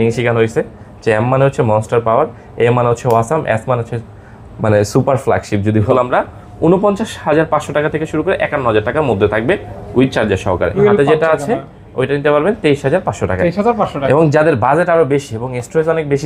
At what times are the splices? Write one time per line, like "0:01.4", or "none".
0:05.9
0:10.7